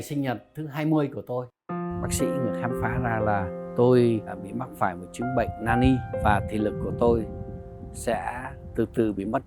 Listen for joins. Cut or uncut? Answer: cut